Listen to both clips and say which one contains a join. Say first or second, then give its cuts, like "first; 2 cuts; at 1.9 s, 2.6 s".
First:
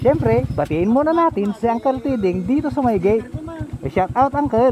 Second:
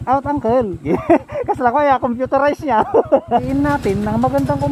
second; 1 cut; at 3.4 s